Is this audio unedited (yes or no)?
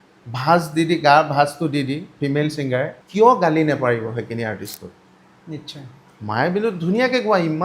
no